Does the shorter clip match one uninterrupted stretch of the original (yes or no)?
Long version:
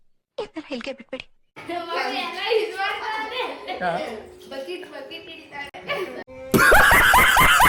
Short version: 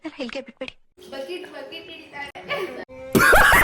no